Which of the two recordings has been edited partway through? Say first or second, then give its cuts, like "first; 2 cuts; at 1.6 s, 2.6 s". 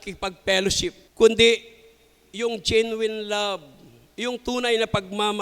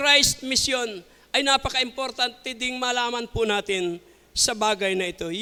first; 1 cut; at 1.0 s